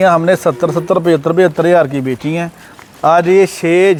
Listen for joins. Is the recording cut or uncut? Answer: uncut